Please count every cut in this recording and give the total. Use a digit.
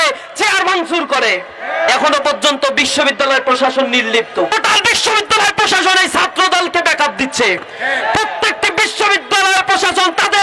1